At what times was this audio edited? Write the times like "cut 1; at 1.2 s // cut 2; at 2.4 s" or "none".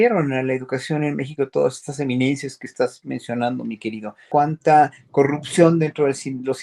cut 1; at 4.2 s